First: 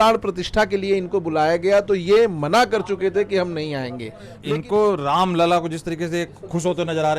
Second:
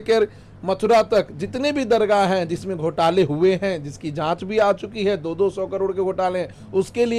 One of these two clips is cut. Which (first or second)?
first